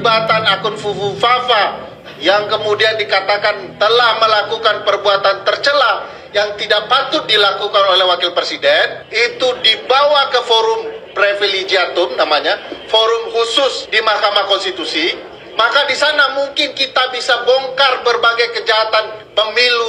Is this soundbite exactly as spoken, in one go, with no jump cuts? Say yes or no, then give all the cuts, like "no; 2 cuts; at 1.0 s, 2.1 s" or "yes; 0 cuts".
yes; 0 cuts